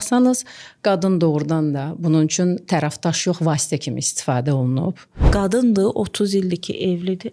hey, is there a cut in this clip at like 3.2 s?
no; 1 cut; at 5.1 s

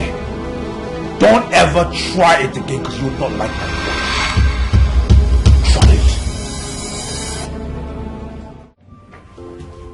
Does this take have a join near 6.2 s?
no; 1 cut; at 8.5 s

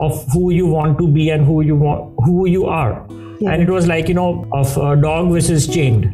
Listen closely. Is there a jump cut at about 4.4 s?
yes; 1 cut; at 4.4 s

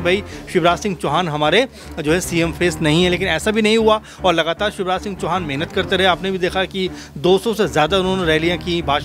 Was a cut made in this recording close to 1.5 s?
no; 0 cuts

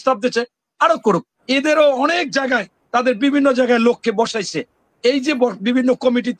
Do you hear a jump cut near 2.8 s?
no; 1 cut; at 1.3 s

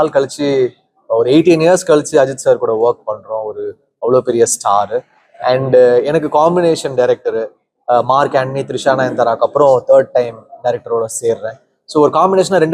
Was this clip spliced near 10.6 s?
no; 0 cuts

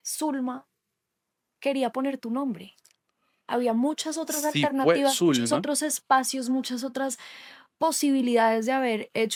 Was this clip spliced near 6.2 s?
no; 0 cuts

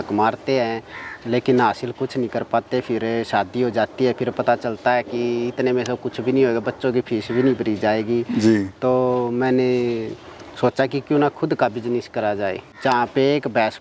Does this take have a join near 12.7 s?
yes; 1 cut; at 12.7 s

